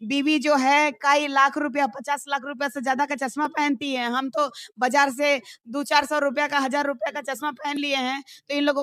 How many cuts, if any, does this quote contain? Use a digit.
0